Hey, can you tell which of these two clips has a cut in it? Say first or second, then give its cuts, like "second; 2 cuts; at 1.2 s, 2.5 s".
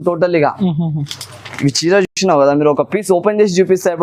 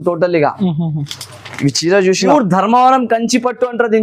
second; 1 cut; at 2.2 s